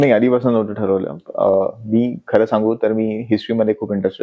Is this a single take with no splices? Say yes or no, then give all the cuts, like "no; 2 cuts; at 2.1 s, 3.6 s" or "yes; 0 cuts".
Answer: yes; 0 cuts